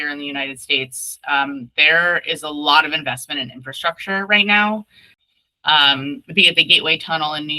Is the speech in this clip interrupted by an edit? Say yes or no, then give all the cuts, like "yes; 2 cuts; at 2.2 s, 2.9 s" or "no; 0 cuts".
yes; 1 cut; at 5.1 s